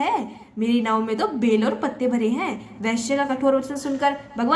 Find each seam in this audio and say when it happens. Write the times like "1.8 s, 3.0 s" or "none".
3.0 s

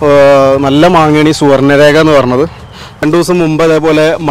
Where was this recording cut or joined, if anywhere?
3.0 s

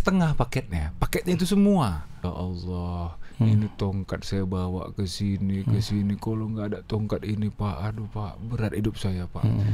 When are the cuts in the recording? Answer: 2.2 s

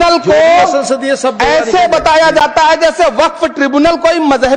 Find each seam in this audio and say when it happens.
none

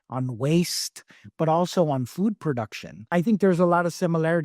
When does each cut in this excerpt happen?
3.1 s

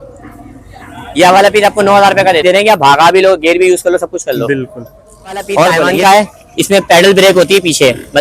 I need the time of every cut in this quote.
2.4 s, 5.9 s

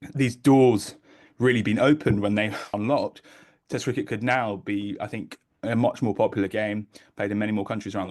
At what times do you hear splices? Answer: 2.8 s

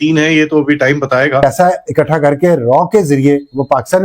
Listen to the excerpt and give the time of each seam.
1.4 s

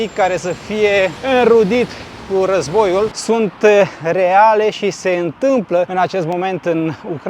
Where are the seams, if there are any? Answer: 3.2 s

